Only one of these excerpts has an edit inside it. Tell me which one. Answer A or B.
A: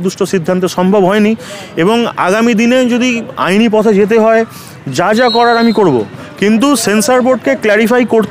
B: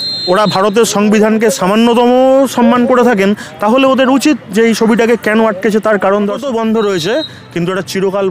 B